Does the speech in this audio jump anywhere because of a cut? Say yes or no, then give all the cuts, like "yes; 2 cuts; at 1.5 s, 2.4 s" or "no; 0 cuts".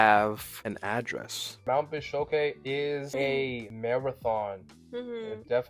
yes; 2 cuts; at 1.6 s, 3.4 s